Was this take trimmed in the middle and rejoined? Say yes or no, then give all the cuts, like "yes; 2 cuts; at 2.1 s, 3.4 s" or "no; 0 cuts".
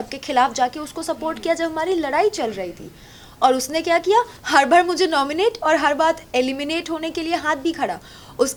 no; 0 cuts